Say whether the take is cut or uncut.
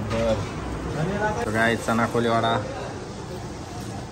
cut